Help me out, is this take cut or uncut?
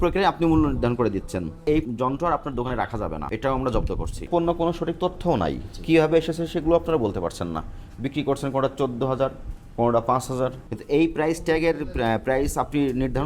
cut